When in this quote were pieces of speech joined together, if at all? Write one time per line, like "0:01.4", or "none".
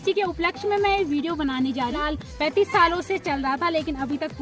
0:02.0